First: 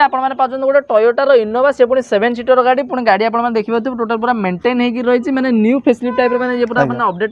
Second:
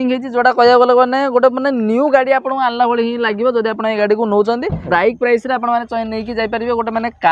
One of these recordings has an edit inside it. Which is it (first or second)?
second